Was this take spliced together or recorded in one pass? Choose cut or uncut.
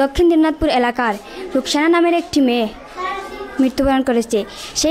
uncut